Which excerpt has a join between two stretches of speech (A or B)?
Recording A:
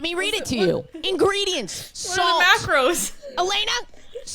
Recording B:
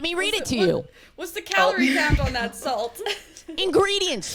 A